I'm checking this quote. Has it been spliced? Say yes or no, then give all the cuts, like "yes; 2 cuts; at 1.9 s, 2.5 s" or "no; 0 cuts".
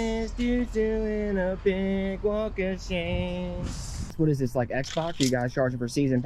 yes; 1 cut; at 4.1 s